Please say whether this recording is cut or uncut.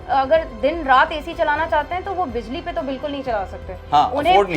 uncut